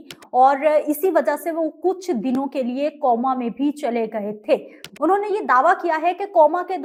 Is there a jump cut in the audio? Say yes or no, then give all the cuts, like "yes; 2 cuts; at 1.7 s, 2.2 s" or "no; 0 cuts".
no; 0 cuts